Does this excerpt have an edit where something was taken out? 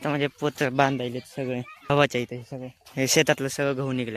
yes; 1 cut; at 1.9 s

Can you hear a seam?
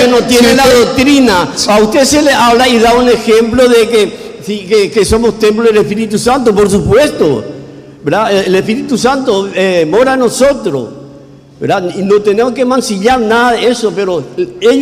no; 0 cuts

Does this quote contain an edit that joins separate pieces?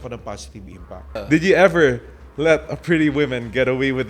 yes; 1 cut; at 1.1 s

